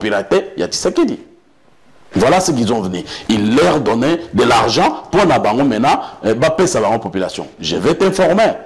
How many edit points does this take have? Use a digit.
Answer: 0